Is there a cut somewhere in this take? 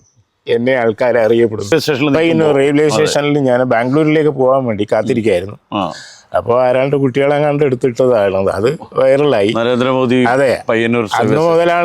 yes; 1 cut; at 1.7 s

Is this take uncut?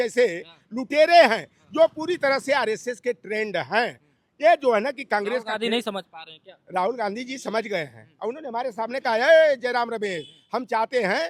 yes; 0 cuts

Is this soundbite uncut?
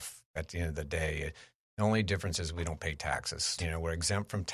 no; 1 cut; at 3.5 s

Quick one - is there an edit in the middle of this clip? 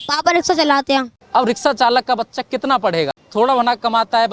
yes; 2 cuts; at 1.2 s, 3.2 s

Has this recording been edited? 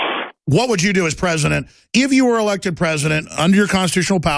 yes; 1 cut; at 1.8 s

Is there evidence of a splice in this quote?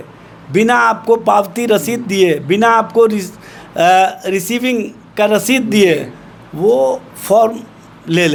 no; 0 cuts

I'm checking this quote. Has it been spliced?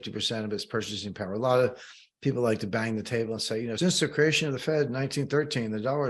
yes; 1 cut; at 3.7 s

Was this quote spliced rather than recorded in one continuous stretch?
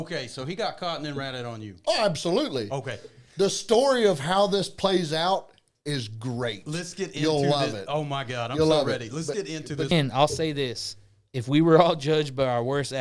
yes; 1 cut; at 9.9 s

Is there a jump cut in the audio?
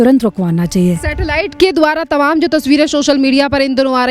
no; 0 cuts

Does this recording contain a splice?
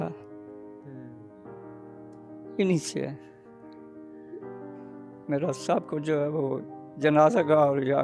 no; 0 cuts

